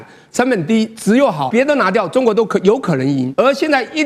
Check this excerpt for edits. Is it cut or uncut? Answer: cut